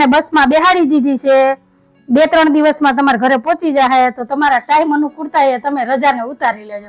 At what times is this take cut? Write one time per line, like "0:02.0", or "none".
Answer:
none